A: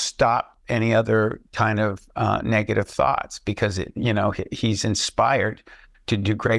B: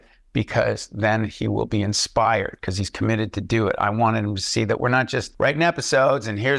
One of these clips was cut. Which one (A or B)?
B